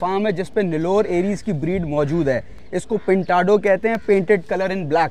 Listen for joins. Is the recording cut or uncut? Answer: uncut